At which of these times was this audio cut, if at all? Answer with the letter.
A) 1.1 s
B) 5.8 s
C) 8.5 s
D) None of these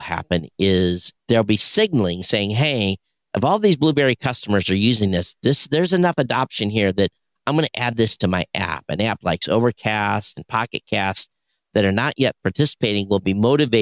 A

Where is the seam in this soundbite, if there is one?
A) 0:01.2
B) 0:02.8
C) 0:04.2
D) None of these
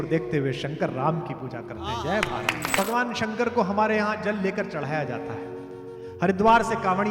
B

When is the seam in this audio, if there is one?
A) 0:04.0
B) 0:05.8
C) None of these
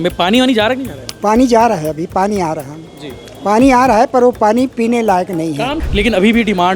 B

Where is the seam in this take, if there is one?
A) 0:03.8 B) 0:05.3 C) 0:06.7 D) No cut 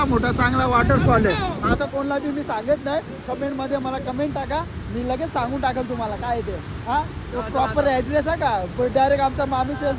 D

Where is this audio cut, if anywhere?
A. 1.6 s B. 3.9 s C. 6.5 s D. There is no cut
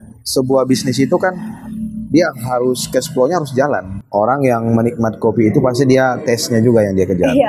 B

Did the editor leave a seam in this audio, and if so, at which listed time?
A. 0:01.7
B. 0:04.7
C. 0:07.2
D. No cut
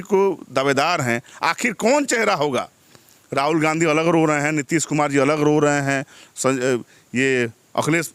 D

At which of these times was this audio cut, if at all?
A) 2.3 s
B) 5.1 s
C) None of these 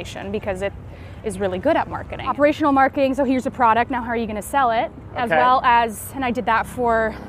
A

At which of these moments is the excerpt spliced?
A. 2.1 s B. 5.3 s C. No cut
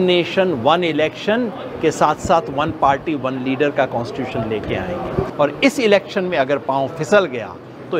B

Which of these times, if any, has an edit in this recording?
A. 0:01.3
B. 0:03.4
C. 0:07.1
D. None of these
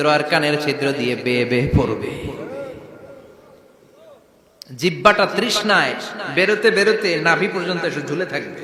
D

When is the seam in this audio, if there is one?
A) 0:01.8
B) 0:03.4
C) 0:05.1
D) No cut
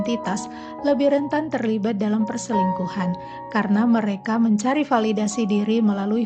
D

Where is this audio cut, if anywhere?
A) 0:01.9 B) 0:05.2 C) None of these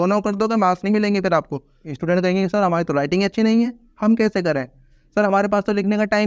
A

